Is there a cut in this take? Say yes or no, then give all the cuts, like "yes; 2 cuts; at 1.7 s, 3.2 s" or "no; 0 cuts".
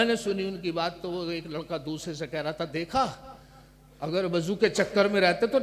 no; 0 cuts